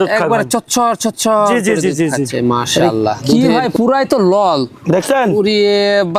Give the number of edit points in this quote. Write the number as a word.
one